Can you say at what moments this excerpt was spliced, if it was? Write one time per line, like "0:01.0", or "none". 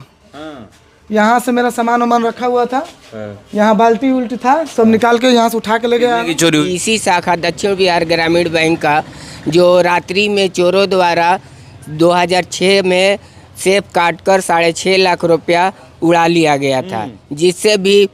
0:06.7